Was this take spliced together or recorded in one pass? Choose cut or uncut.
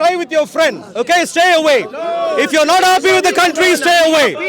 uncut